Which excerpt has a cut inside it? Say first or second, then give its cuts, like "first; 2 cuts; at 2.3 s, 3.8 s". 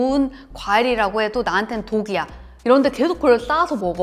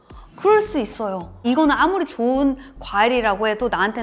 second; 1 cut; at 1.3 s